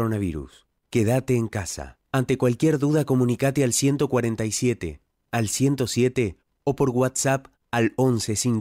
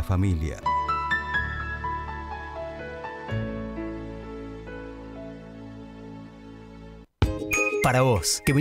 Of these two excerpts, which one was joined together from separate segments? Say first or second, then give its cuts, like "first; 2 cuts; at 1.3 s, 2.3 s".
second; 1 cut; at 7.1 s